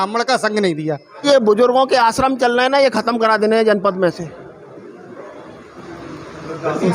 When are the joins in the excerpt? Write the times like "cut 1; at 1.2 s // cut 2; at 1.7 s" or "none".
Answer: cut 1; at 1.2 s